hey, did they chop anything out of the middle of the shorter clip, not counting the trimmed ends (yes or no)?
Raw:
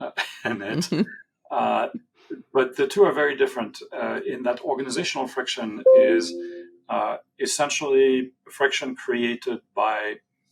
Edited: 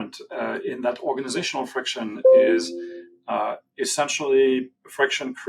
no